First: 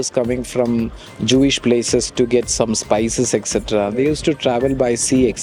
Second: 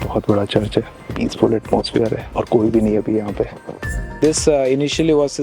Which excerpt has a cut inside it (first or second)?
second